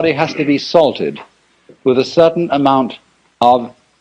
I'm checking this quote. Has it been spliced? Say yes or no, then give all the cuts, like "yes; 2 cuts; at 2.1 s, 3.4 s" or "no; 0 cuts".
no; 0 cuts